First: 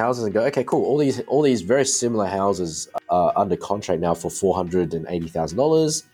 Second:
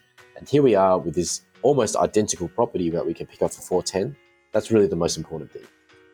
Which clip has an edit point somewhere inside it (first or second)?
first